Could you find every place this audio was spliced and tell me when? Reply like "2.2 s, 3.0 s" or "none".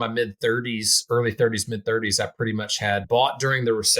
3.0 s